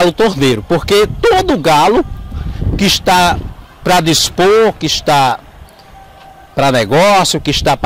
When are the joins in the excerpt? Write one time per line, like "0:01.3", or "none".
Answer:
none